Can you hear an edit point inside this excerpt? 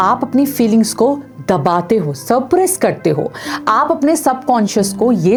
no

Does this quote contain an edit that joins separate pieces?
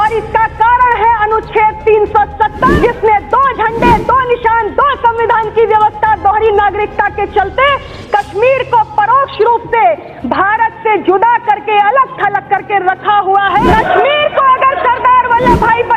yes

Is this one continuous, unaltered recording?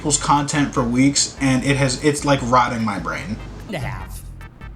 yes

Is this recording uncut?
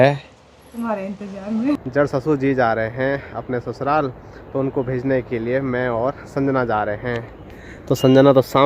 no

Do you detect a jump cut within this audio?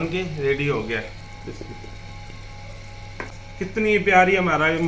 yes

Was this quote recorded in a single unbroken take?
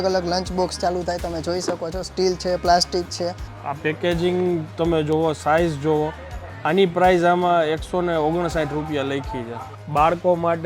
no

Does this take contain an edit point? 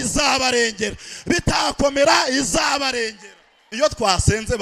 yes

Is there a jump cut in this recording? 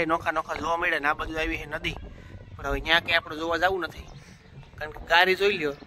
no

